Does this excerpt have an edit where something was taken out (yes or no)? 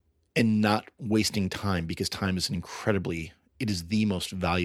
no